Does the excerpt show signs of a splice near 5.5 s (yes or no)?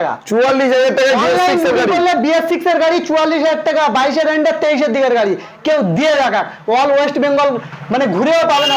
no